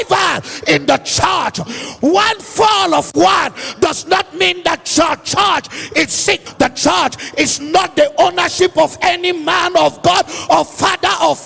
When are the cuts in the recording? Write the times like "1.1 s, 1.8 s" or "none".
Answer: 6.5 s